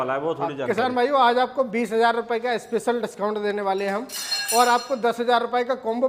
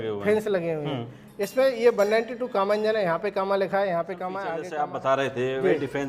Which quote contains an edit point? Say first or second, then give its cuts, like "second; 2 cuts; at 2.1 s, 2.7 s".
second; 1 cut; at 4.6 s